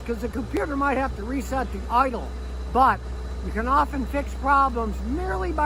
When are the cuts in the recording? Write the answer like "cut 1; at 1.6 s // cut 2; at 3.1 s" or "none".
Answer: none